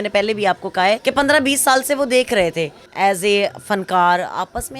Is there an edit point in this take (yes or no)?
yes